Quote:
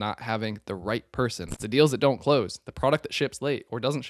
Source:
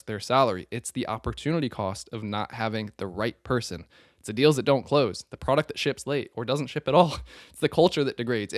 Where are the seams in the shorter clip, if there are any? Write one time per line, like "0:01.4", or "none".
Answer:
0:01.5